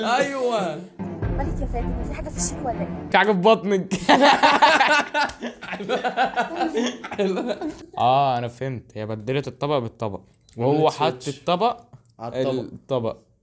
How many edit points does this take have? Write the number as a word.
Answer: one